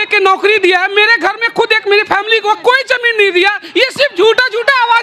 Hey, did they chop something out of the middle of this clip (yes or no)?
no